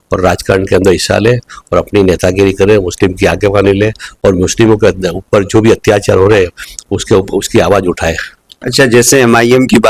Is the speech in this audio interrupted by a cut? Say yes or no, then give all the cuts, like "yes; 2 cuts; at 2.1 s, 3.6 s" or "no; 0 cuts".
no; 0 cuts